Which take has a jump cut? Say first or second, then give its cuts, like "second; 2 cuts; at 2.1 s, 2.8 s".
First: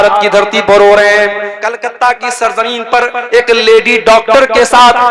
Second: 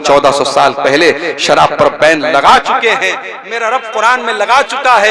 first; 1 cut; at 1.5 s